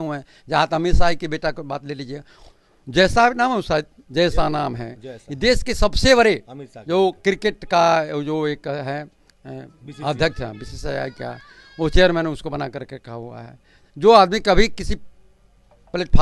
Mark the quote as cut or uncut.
uncut